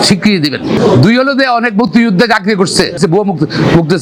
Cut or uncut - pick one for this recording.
uncut